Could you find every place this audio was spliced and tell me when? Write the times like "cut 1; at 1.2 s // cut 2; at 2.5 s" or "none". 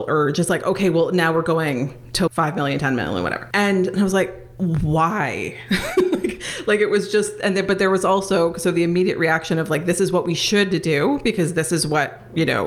cut 1; at 2.3 s // cut 2; at 3.4 s // cut 3; at 4.4 s